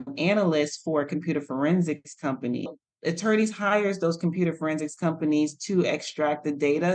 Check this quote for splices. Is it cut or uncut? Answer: cut